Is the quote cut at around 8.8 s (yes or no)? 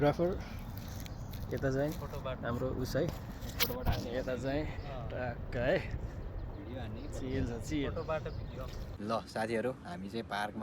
yes